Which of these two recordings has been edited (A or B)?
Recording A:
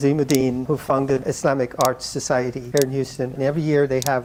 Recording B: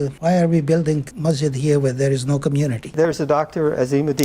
B